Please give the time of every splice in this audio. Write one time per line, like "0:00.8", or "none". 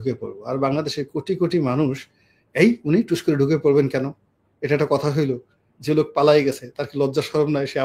none